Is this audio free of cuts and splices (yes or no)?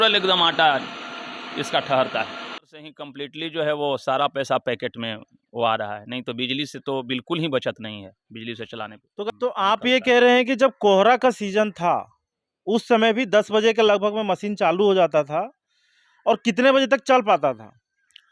no